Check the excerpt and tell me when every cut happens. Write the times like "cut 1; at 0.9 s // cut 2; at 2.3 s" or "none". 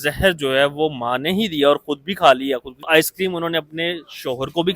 cut 1; at 2.9 s